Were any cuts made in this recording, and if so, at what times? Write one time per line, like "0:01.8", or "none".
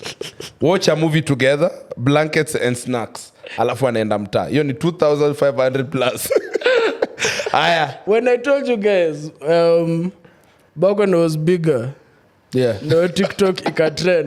0:08.0